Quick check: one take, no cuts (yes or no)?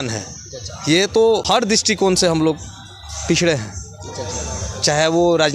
no